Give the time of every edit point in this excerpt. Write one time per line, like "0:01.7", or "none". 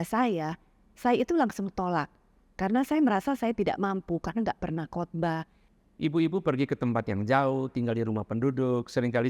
0:05.6